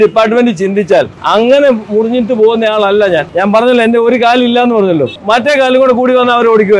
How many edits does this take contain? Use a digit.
3